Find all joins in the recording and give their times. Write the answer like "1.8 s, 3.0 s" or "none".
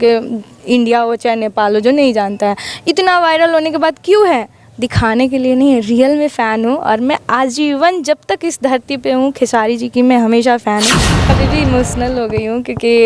11.3 s

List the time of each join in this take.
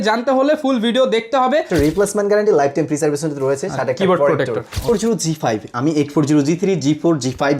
1.7 s, 4.9 s

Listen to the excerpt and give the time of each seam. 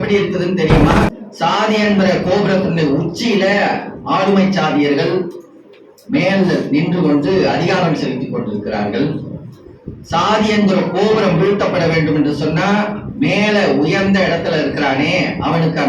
1.1 s

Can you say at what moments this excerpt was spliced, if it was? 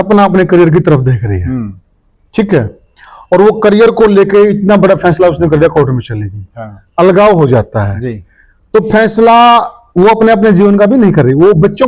none

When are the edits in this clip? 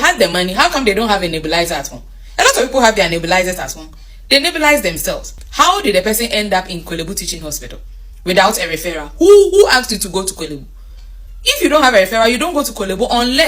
5.4 s

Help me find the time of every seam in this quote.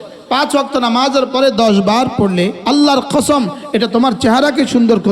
2.6 s

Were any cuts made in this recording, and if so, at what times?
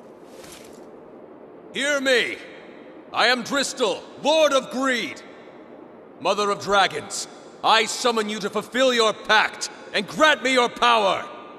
1.7 s

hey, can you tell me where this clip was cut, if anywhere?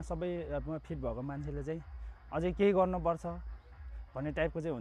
none

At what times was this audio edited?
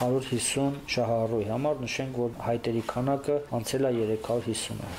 0.8 s, 2.4 s, 3.5 s

